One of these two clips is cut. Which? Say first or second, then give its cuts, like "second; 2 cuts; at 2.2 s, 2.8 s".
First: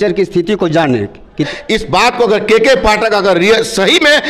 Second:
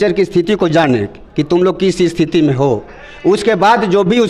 first; 1 cut; at 1.4 s